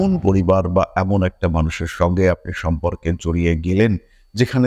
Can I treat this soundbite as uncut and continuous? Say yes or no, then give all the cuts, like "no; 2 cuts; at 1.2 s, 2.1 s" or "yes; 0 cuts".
yes; 0 cuts